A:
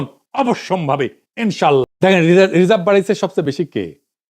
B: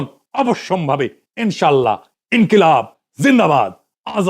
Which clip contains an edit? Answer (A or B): A